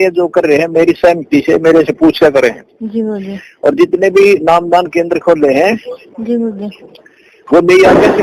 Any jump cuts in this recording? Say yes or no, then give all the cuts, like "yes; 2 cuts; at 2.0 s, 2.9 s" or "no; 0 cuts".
no; 0 cuts